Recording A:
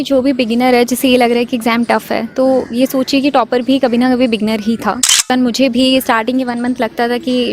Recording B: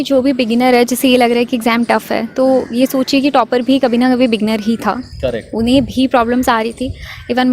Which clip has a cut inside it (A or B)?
A